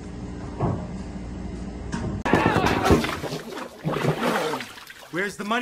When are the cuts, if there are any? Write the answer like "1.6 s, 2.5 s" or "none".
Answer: 2.2 s